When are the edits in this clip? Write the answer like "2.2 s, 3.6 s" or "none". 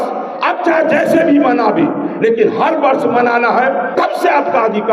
3.9 s